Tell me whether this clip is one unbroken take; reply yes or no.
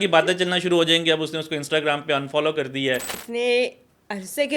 no